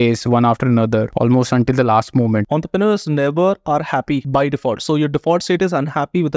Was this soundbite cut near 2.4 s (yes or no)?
yes